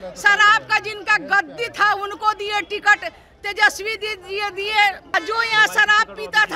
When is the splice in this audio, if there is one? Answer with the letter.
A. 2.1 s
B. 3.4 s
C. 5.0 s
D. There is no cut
C